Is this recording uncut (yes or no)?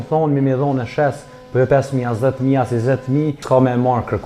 no